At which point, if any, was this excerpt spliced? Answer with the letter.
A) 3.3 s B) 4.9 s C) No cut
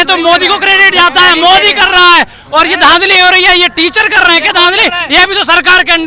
C